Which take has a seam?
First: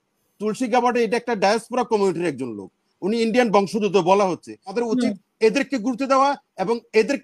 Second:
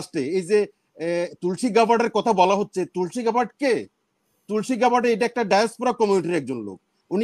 first; 1 cut; at 4.7 s

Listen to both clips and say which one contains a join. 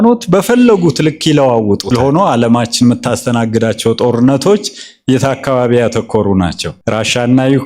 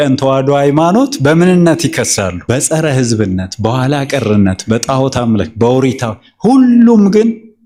first; 1 cut; at 1.9 s

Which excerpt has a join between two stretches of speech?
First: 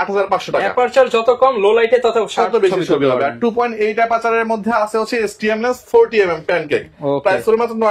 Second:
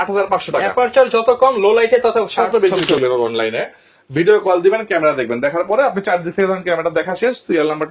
second; 1 cut; at 3.0 s

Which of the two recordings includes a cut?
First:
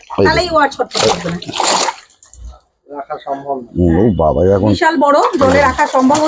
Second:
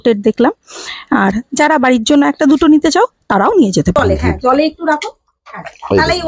second; 1 cut; at 4.0 s

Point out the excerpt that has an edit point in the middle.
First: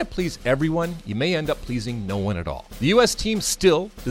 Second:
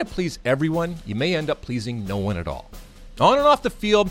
first; 1 cut; at 2.6 s

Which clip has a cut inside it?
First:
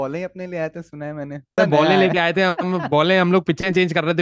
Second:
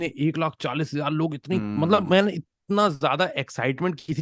first; 1 cut; at 1.6 s

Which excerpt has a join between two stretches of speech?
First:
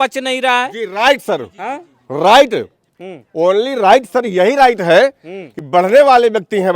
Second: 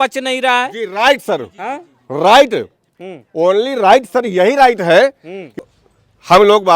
second; 1 cut; at 5.6 s

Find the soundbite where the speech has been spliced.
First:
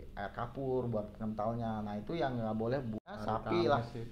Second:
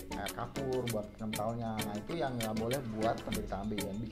first; 1 cut; at 2.9 s

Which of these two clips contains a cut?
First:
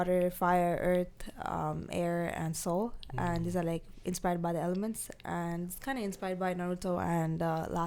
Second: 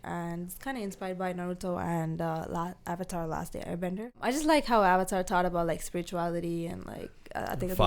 second; 1 cut; at 4.2 s

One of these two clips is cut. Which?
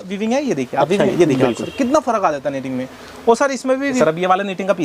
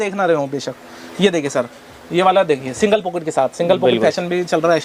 first; 2 cuts; at 1.1 s, 4.0 s

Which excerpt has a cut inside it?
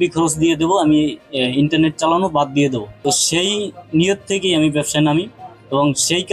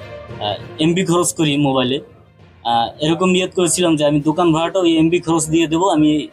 first; 1 cut; at 2.9 s

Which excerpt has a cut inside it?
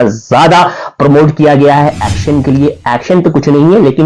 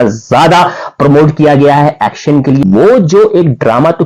second; 1 cut; at 2.6 s

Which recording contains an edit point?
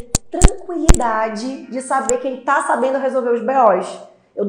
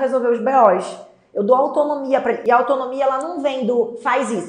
second; 1 cut; at 2.4 s

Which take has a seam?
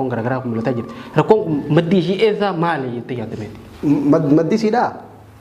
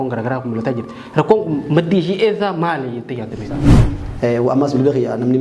second; 1 cut; at 3.7 s

